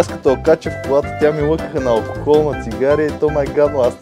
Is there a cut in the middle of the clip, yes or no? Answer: no